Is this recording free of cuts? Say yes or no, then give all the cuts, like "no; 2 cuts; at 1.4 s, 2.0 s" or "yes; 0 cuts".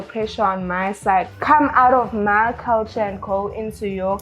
no; 1 cut; at 1.3 s